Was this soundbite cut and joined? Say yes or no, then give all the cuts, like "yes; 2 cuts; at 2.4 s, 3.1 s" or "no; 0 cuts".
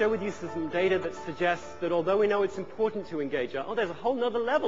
no; 0 cuts